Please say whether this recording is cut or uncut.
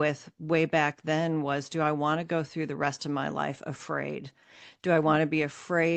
uncut